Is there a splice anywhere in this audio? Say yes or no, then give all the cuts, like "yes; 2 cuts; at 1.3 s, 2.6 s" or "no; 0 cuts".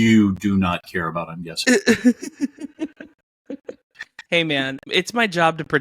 yes; 1 cut; at 4.8 s